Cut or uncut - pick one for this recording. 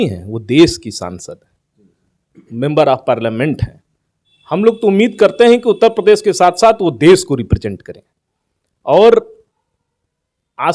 uncut